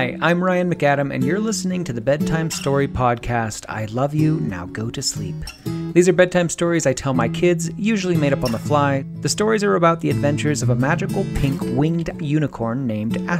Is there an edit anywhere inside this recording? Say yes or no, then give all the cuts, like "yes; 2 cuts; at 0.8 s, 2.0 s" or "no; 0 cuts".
yes; 1 cut; at 9.1 s